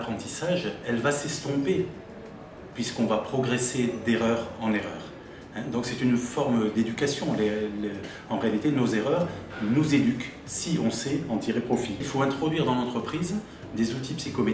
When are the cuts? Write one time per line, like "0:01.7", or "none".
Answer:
0:12.1